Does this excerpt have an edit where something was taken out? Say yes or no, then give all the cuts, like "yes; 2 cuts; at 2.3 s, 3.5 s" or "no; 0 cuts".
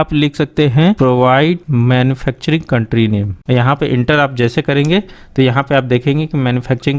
yes; 2 cuts; at 1.6 s, 3.3 s